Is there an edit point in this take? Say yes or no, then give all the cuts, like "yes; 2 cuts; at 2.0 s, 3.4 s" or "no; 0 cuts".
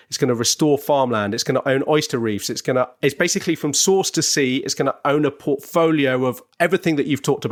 no; 0 cuts